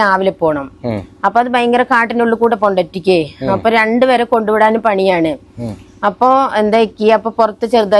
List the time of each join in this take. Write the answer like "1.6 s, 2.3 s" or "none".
none